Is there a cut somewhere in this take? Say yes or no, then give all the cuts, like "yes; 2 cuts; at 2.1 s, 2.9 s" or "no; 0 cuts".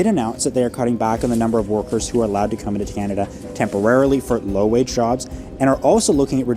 no; 0 cuts